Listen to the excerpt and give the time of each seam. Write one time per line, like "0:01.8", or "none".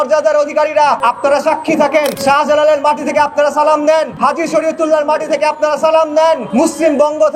0:01.0
0:02.2
0:04.1
0:06.5